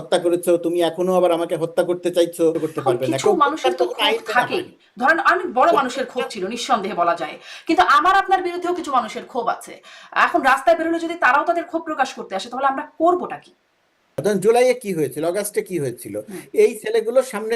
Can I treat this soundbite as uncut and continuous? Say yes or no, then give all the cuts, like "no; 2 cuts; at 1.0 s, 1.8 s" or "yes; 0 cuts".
no; 2 cuts; at 2.6 s, 14.1 s